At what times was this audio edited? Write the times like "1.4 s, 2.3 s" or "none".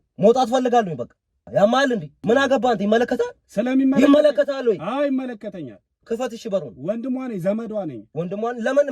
1.5 s, 2.1 s